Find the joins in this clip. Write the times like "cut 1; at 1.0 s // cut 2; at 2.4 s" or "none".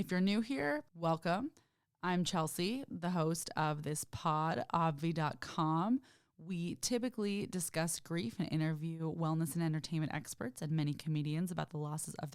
cut 1; at 0.9 s